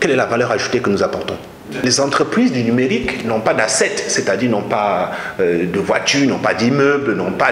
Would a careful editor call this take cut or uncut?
cut